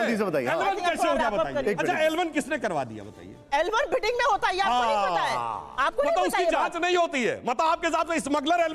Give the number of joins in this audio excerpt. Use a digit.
0